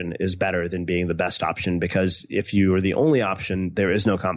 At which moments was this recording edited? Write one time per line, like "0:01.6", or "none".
none